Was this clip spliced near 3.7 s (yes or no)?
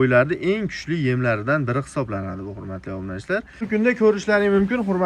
yes